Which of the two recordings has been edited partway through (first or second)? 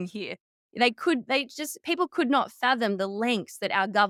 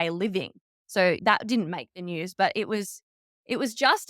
second